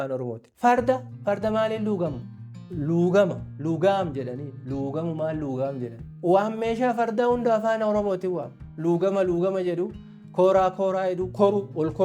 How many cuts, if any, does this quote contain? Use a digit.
1